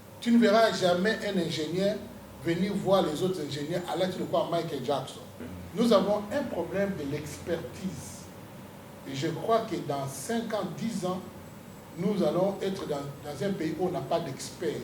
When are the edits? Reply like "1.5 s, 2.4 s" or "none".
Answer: 5.5 s